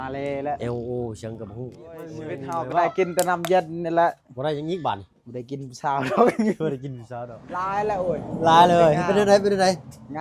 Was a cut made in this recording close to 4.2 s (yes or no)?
no